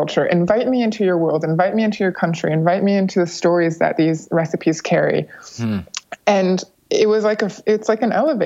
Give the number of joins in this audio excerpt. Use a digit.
1